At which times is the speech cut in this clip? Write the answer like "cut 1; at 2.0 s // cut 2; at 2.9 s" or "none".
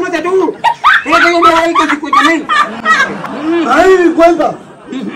none